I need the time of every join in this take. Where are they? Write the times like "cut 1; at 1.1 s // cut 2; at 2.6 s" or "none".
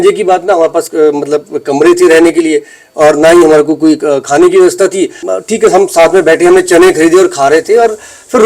cut 1; at 5.2 s